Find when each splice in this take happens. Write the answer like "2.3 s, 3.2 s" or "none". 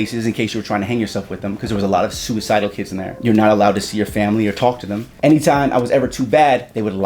3.1 s, 5.1 s